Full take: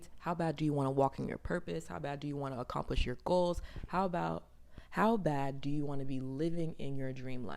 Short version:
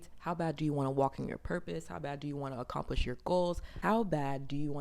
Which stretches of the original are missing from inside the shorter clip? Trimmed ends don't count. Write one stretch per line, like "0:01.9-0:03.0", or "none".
0:03.7-0:04.8